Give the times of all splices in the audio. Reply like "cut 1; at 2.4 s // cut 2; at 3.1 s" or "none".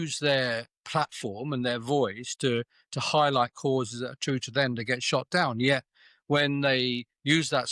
none